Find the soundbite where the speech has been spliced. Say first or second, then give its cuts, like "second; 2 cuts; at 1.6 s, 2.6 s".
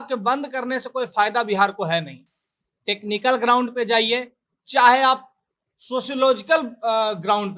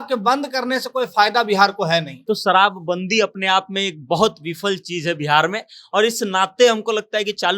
second; 1 cut; at 2.1 s